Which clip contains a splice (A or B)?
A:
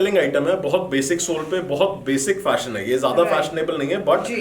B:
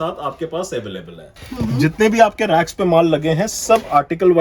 B